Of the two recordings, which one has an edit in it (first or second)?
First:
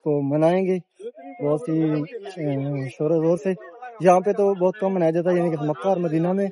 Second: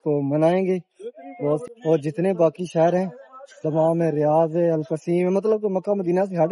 second